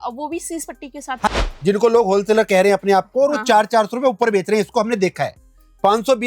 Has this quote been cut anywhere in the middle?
yes; 1 cut; at 1.3 s

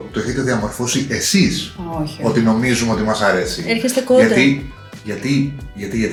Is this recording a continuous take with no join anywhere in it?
yes; 0 cuts

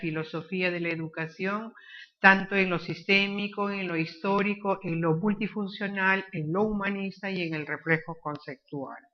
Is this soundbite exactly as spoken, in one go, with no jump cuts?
no; 1 cut; at 5.7 s

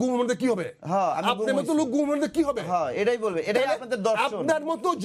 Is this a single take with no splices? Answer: yes; 0 cuts

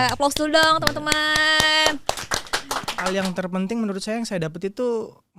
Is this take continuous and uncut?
no; 1 cut; at 3.0 s

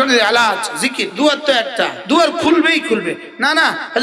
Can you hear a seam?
yes; 1 cut; at 1.0 s

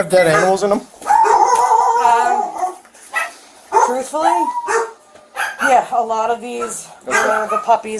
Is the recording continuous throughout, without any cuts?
yes; 0 cuts

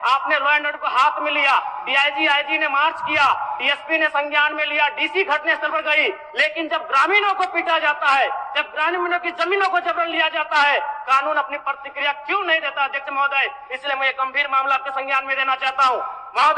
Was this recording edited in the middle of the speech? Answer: no; 0 cuts

